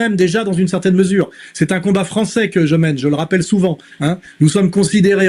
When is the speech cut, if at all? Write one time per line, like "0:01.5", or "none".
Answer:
none